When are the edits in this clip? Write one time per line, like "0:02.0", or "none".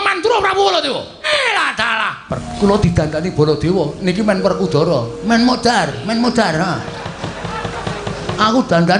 0:01.2
0:02.5